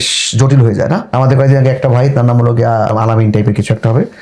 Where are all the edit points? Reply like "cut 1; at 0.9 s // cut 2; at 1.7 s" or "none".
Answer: cut 1; at 1.1 s // cut 2; at 2.9 s